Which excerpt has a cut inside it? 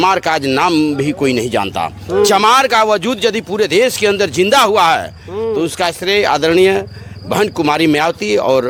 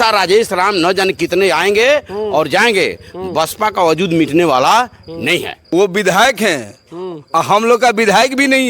second; 1 cut; at 5.6 s

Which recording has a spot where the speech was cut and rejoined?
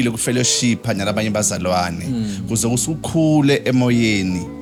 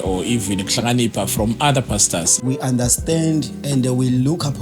second; 1 cut; at 2.4 s

